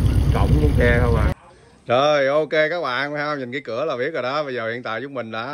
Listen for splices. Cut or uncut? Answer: cut